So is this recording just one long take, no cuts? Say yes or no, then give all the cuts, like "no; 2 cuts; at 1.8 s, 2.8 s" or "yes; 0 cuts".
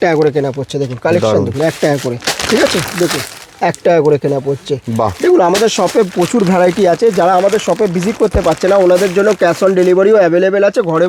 yes; 0 cuts